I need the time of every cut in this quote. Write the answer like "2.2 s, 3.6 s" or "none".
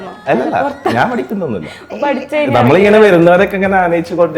none